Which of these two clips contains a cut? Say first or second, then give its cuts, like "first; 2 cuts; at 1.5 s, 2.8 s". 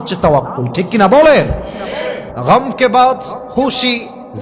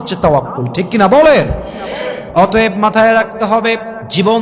first; 2 cuts; at 2.2 s, 3.4 s